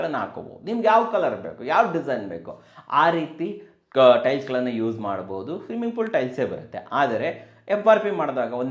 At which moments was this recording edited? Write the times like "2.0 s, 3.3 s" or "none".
none